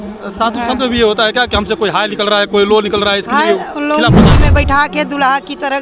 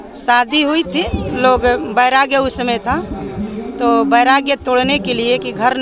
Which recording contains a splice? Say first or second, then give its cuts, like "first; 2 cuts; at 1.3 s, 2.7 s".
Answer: first; 1 cut; at 4.4 s